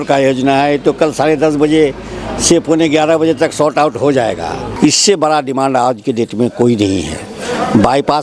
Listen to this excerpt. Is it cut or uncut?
cut